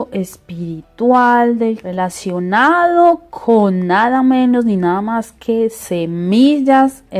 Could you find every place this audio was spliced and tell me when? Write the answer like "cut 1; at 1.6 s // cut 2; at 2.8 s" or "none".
cut 1; at 4.0 s